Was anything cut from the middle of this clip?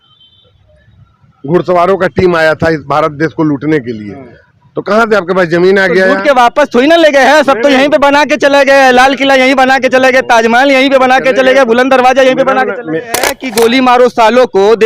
yes; 1 cut; at 13.4 s

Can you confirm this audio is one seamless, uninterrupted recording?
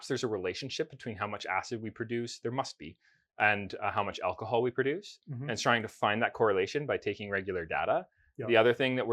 yes; 0 cuts

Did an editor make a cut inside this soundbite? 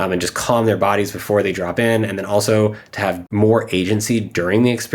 yes; 1 cut; at 3.2 s

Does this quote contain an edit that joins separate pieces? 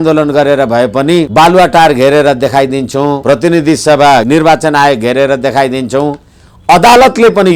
yes; 3 cuts; at 1.3 s, 3.2 s, 4.2 s

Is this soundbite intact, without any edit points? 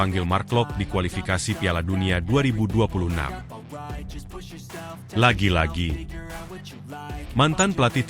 no; 2 cuts; at 3.4 s, 5.1 s

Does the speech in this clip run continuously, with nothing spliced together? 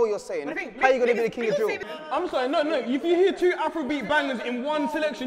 no; 1 cut; at 1.9 s

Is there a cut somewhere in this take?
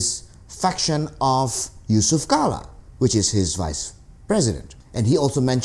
no; 0 cuts

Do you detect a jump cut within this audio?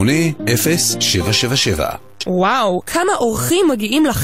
yes; 1 cut; at 2.1 s

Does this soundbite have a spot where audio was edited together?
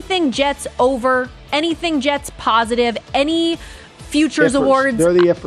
no; 0 cuts

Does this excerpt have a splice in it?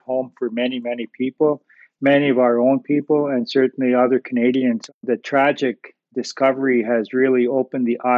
yes; 1 cut; at 4.9 s

